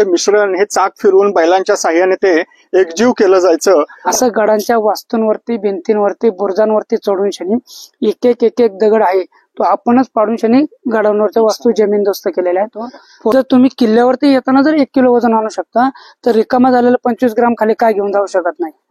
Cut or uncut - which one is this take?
cut